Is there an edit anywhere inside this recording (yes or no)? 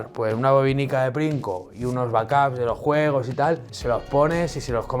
yes